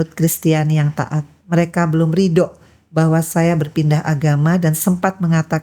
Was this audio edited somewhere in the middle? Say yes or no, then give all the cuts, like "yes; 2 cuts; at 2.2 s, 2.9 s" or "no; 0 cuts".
no; 0 cuts